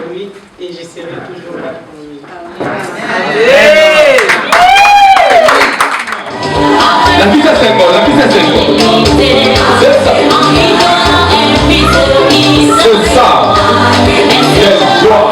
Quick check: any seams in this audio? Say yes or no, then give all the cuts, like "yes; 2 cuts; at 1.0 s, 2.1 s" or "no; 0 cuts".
yes; 1 cut; at 6.3 s